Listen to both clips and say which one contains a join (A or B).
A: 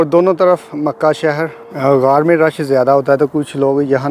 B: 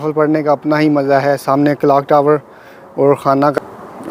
A